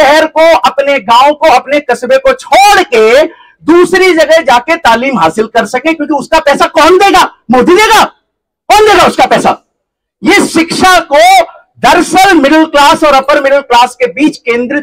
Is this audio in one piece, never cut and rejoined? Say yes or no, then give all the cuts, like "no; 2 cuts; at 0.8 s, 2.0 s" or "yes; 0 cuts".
yes; 0 cuts